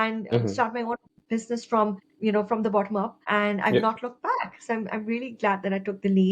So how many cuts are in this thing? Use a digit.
2